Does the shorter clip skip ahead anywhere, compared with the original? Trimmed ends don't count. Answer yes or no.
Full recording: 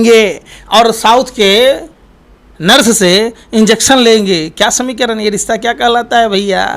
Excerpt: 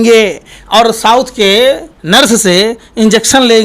yes